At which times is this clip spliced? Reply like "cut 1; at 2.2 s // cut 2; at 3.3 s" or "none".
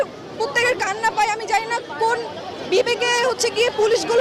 none